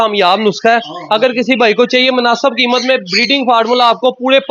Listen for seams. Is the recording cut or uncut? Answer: uncut